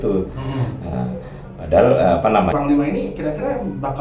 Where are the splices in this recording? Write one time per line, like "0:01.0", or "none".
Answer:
0:02.5